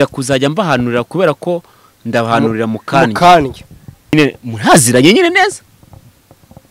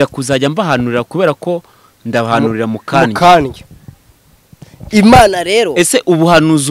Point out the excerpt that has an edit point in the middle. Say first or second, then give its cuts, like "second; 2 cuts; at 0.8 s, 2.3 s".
first; 1 cut; at 4.1 s